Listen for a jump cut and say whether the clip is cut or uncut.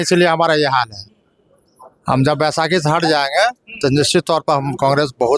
uncut